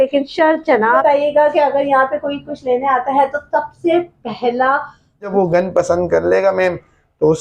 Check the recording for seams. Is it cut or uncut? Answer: cut